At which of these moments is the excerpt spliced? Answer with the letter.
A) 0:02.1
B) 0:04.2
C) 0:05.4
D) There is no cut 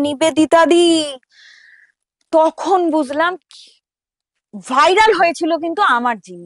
D